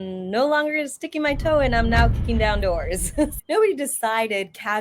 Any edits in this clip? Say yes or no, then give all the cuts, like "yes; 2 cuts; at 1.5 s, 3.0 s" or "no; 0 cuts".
yes; 1 cut; at 3.4 s